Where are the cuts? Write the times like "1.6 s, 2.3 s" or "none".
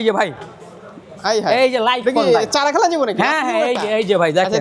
none